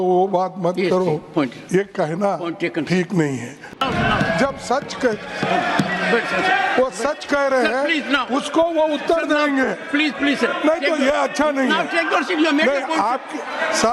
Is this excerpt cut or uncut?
cut